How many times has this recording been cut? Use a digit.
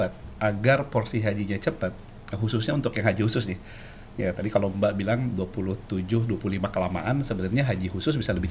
0